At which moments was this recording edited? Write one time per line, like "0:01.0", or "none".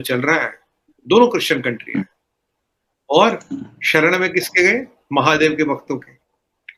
none